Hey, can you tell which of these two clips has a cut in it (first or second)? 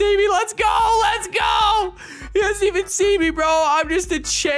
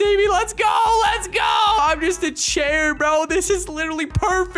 second